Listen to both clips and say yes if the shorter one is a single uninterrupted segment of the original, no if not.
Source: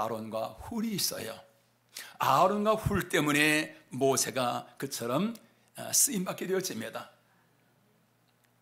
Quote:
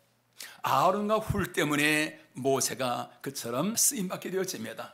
no